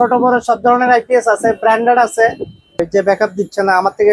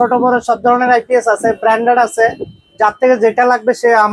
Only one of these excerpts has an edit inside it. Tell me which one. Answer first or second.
first